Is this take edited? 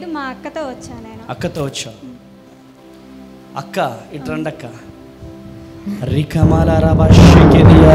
no; 0 cuts

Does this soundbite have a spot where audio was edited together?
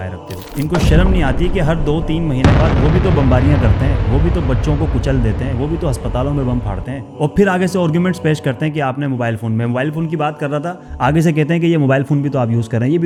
no; 0 cuts

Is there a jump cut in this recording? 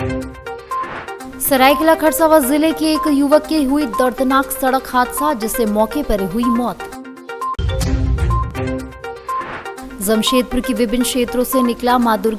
yes; 1 cut; at 1.1 s

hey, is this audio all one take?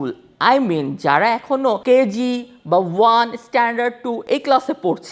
no; 2 cuts; at 1.8 s, 4.2 s

